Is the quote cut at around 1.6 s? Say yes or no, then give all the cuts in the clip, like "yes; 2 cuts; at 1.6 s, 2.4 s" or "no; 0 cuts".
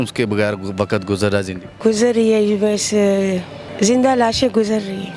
yes; 2 cuts; at 1.6 s, 3.6 s